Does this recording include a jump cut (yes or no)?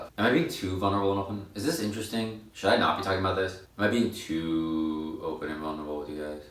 no